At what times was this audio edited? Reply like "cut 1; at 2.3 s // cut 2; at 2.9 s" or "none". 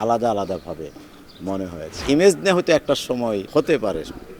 cut 1; at 2.0 s // cut 2; at 3.5 s